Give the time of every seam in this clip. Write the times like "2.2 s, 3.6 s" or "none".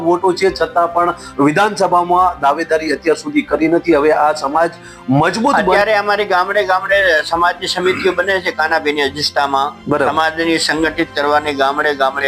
5.6 s